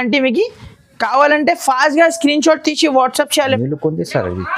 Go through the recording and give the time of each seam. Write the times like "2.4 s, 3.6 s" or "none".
3.6 s